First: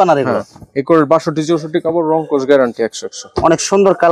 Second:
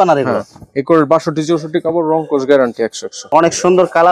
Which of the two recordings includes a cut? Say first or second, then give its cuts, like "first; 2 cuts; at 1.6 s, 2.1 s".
second; 1 cut; at 3.2 s